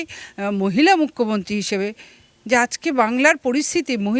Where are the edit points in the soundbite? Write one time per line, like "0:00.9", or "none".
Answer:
none